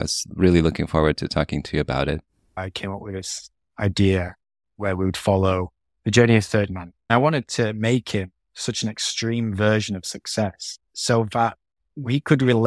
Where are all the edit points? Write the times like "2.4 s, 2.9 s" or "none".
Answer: 2.6 s, 6.9 s